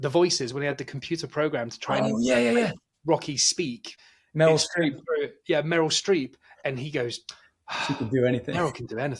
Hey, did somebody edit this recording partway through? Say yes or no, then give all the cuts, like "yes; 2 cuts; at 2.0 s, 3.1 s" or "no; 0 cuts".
yes; 1 cut; at 3.9 s